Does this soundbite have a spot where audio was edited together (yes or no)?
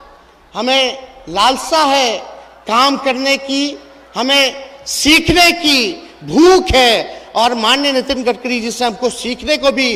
no